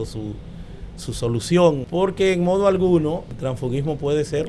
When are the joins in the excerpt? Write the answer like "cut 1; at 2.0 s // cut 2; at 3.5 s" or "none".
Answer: cut 1; at 1.8 s // cut 2; at 3.3 s